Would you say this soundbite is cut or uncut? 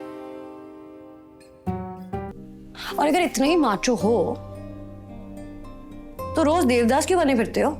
cut